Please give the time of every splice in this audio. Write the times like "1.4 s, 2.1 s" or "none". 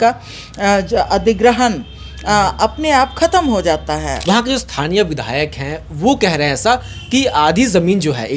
4.1 s